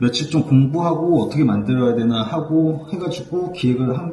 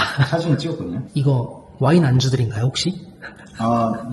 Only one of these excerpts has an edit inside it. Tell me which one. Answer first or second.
second